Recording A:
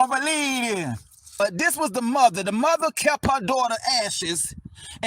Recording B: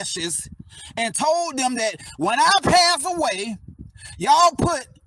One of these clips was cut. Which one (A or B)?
A